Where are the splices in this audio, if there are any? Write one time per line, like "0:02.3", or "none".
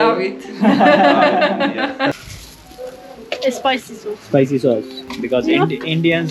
0:02.1
0:05.0